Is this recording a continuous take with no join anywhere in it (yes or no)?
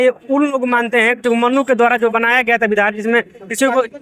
yes